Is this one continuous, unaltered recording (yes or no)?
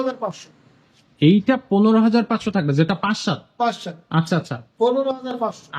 yes